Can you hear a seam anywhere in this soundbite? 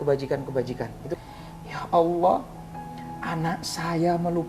yes; 1 cut; at 1.1 s

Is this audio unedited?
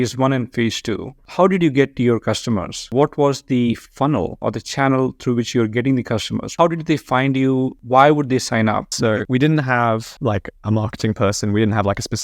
no; 4 cuts; at 1.2 s, 6.5 s, 7.8 s, 9.2 s

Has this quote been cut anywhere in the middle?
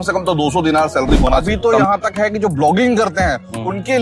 yes; 1 cut; at 1.4 s

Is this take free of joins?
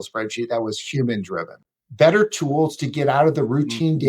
no; 1 cut; at 1.5 s

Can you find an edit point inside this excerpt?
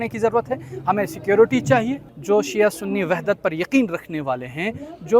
yes; 1 cut; at 2.1 s

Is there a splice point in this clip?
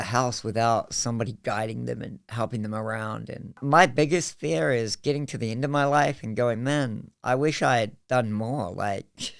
yes; 1 cut; at 3.6 s

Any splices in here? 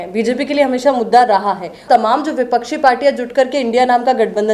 yes; 1 cut; at 1.8 s

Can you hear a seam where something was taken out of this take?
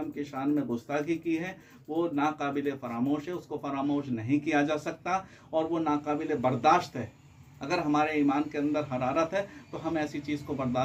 no; 0 cuts

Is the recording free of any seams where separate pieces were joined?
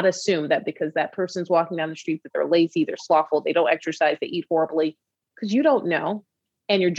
yes; 0 cuts

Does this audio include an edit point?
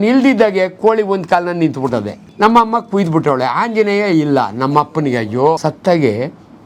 yes; 2 cuts; at 2.2 s, 5.6 s

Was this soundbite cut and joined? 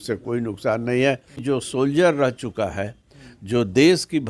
yes; 1 cut; at 1.4 s

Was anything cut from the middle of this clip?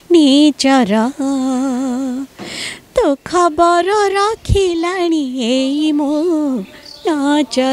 no; 0 cuts

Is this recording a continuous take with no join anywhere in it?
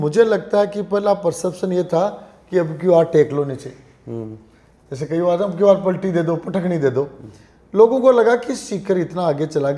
yes; 0 cuts

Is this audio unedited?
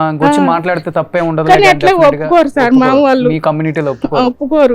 yes; 0 cuts

